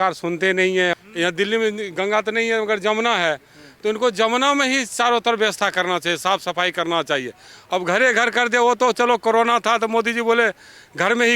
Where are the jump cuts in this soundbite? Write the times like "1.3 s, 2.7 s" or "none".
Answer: 0.9 s